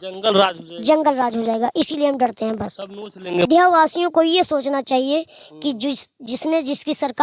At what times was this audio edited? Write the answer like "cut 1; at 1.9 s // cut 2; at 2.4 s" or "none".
cut 1; at 3.5 s